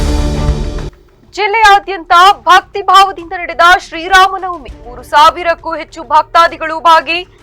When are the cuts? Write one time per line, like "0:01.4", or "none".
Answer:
0:01.0